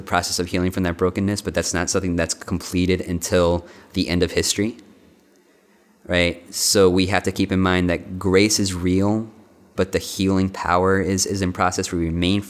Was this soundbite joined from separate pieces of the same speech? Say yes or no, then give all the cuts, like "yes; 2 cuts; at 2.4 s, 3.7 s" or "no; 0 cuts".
no; 0 cuts